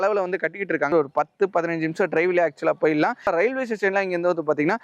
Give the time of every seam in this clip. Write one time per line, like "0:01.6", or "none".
0:00.9
0:03.5

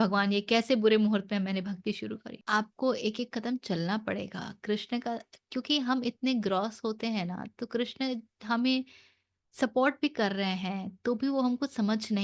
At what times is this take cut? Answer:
0:02.3

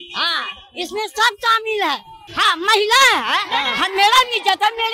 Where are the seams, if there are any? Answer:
0:02.2

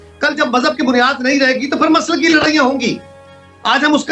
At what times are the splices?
none

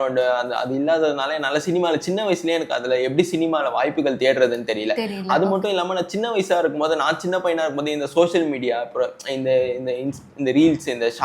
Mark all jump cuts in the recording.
none

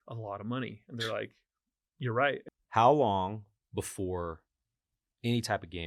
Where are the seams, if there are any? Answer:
0:02.4

